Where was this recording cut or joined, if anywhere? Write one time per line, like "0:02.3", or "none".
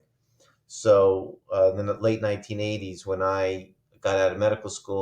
none

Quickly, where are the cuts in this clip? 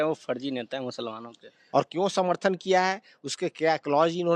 0:01.6

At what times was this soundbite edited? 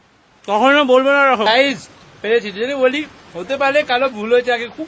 0:01.5

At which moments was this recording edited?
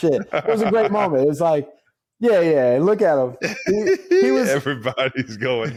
none

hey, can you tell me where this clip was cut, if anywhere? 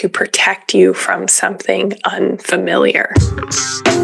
0:03.0

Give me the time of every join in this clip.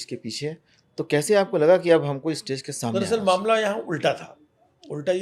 0:02.9

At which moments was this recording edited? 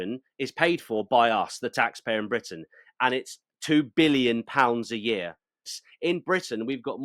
0:05.7

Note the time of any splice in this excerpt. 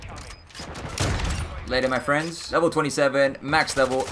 0:02.4

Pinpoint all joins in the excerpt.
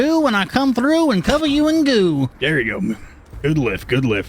0:02.3

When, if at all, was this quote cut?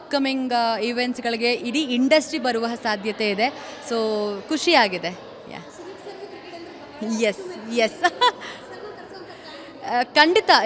none

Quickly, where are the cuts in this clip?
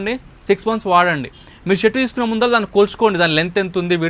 none

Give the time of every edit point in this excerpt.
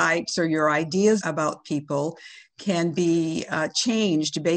0:01.2

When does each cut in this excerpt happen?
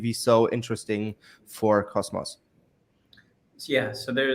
none

